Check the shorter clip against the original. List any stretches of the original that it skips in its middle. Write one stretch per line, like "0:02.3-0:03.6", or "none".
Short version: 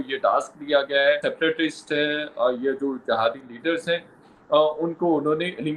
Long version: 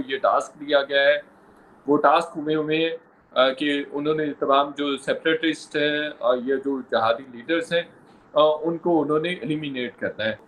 0:01.2-0:05.1